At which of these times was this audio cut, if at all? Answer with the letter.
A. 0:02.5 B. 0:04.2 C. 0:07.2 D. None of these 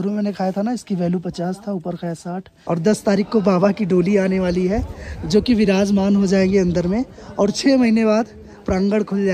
A